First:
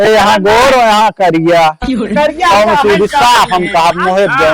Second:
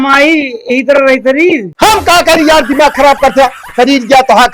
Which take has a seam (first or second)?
second